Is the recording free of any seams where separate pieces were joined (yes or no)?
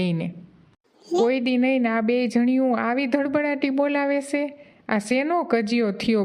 no